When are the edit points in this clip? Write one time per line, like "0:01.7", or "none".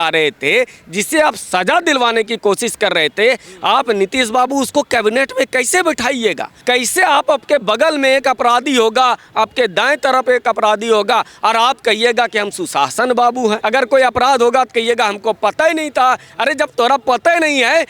0:06.5
0:13.6

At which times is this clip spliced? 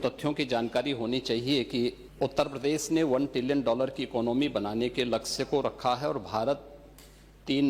0:02.0

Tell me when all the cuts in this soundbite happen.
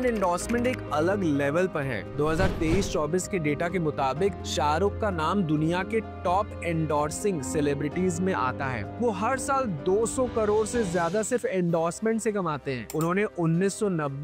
none

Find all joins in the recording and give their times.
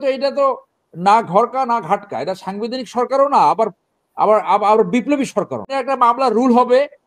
0:05.7

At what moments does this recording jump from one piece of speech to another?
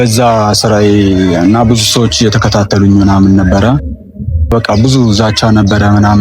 0:04.5

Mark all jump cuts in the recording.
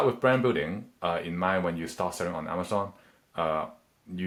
none

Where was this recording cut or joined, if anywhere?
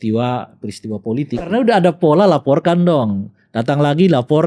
0:01.5

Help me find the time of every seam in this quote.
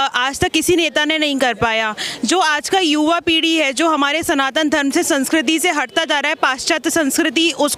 none

